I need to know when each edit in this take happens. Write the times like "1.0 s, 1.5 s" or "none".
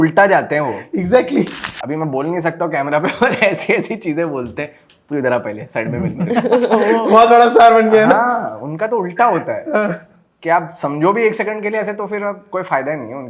none